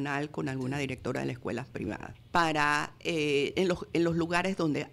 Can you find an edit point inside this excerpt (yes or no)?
yes